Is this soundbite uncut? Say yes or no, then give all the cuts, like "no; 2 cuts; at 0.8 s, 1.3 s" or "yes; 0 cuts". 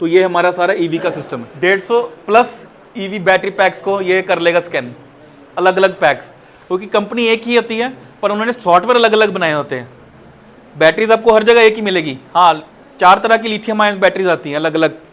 yes; 0 cuts